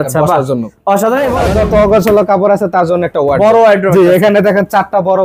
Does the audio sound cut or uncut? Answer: cut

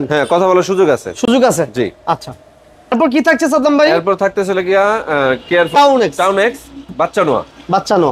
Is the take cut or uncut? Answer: uncut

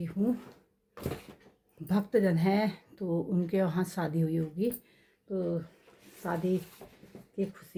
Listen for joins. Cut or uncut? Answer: uncut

